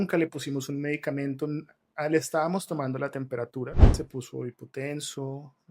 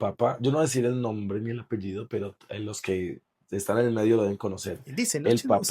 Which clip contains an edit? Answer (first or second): first